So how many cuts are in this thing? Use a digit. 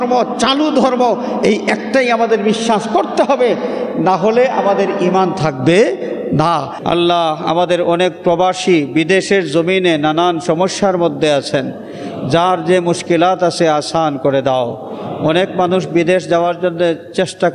1